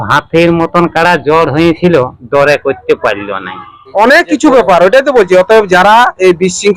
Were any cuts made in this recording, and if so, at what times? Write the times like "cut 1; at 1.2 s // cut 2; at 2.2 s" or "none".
cut 1; at 3.8 s